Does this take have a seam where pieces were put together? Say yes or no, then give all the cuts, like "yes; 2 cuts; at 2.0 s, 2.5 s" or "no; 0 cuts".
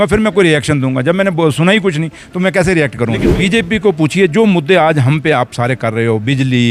yes; 1 cut; at 3.2 s